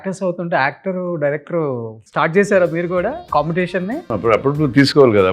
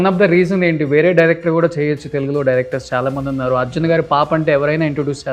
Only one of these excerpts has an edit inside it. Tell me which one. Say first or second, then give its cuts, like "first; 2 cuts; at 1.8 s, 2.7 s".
first; 3 cuts; at 2.0 s, 3.2 s, 4.1 s